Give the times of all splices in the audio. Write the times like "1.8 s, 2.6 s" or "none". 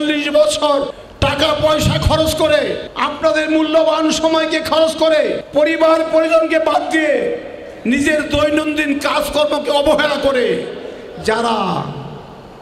0.9 s, 3.1 s, 5.2 s